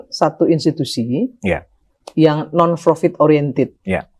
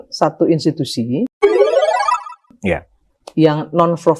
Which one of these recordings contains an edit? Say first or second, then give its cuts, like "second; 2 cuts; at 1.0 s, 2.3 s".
first; 1 cut; at 1.3 s